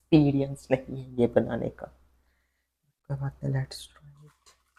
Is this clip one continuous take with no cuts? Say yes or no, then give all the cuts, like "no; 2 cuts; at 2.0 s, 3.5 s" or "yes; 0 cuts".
yes; 0 cuts